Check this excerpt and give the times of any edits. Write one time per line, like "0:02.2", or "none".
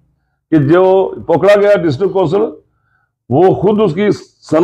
none